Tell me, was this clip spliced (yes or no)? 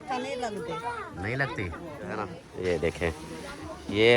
yes